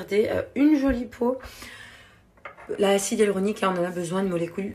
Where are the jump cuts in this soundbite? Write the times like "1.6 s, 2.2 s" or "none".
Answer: none